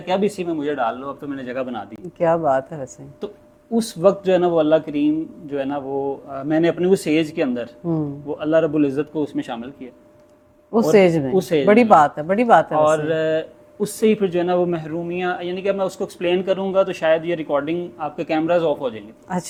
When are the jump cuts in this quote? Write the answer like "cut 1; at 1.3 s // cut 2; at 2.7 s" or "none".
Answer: none